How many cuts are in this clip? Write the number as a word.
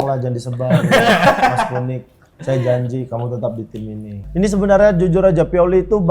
one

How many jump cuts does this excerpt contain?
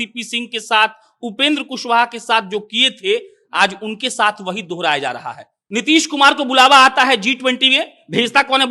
one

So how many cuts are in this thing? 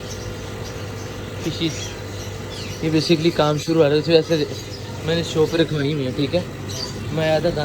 zero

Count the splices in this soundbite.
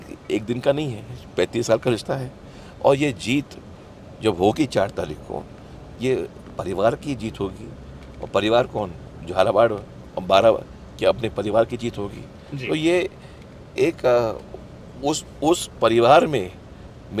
zero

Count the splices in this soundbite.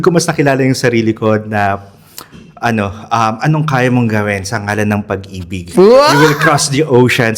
zero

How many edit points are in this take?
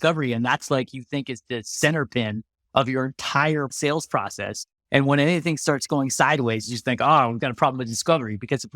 one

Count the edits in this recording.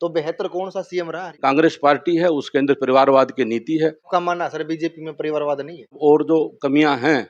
three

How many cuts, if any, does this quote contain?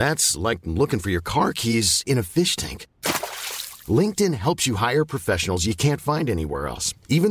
zero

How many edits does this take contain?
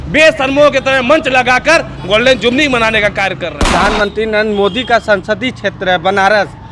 one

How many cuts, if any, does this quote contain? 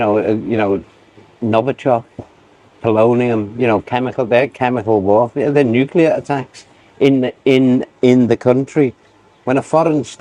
zero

